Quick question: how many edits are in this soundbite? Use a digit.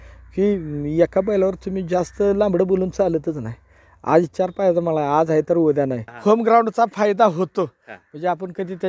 1